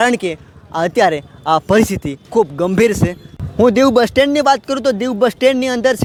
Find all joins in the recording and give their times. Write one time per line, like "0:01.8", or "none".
none

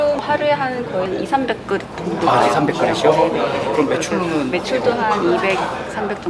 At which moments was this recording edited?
0:01.1

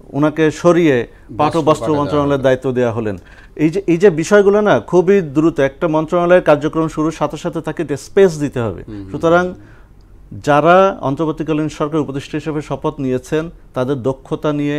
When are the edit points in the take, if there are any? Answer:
none

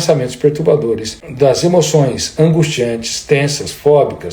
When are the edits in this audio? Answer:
0:01.2

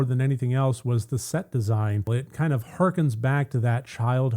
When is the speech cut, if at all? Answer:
0:02.2

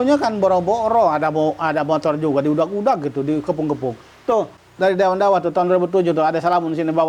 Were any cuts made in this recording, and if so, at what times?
0:04.6

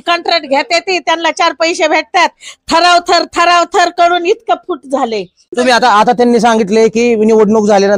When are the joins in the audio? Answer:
0:05.5

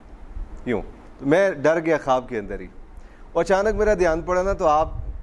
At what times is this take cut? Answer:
0:01.1

